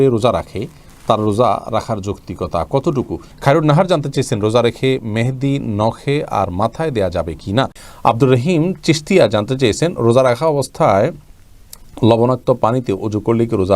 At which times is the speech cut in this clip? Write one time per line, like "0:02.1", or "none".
0:03.2
0:07.8